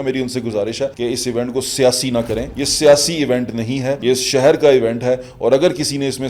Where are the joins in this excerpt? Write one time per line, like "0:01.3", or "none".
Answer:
0:00.9
0:02.6
0:04.0